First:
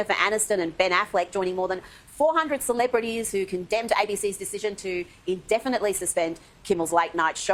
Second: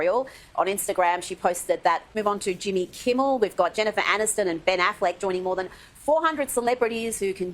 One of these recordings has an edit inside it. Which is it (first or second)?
second